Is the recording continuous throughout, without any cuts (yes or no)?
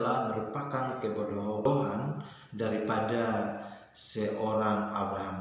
no